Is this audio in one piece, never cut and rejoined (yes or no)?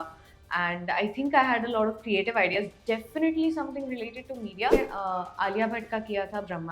no